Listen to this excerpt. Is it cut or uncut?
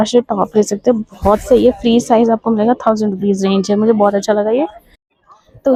uncut